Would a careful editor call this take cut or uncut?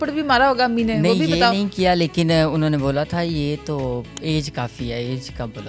uncut